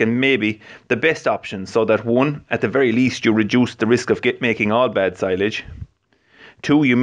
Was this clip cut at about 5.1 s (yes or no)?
no